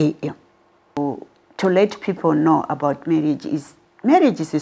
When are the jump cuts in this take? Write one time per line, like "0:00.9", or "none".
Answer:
0:01.0

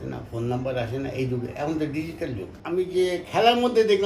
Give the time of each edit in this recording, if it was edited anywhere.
0:02.5

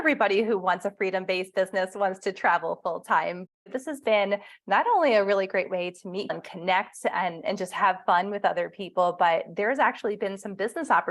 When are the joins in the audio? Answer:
0:03.6
0:06.3

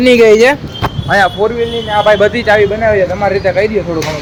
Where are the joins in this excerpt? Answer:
none

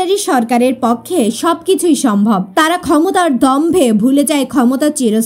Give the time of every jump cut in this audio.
0:02.5

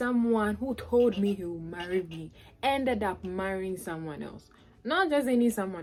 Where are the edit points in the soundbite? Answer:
none

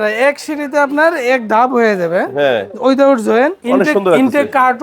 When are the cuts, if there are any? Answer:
0:03.6

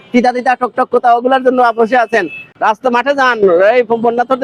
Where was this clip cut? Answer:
none

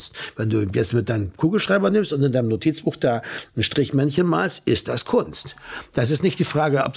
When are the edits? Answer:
none

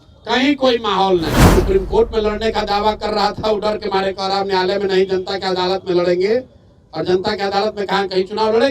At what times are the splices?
0:01.5

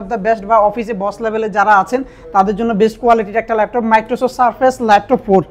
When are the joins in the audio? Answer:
none

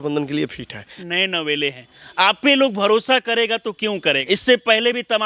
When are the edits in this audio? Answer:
0:01.0
0:04.2

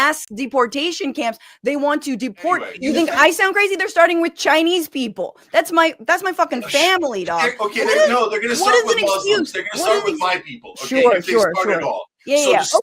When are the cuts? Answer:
0:02.7
0:07.6

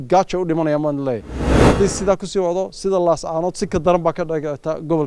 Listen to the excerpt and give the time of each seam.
0:01.5

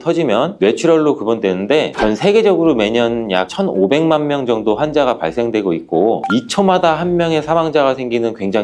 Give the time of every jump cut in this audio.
none

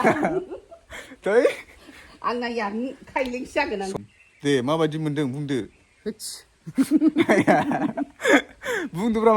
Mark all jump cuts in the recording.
0:03.9

